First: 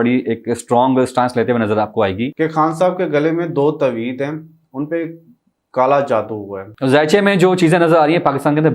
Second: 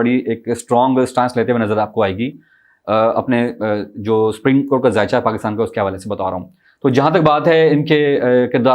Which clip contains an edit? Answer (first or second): first